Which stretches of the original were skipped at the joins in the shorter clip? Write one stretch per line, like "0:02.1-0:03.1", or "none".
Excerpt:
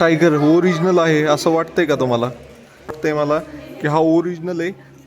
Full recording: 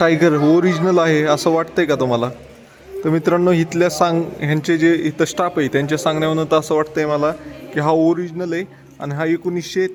0:03.0-0:06.9